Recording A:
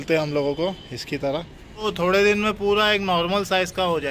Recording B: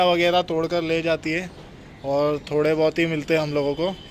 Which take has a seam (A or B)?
A